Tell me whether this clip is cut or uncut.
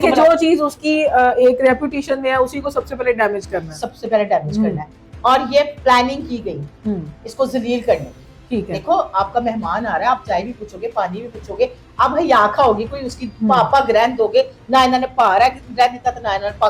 uncut